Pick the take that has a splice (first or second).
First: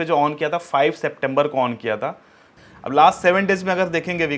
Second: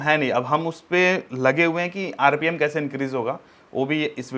first